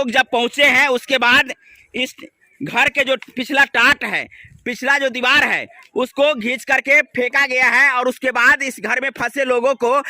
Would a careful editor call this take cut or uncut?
uncut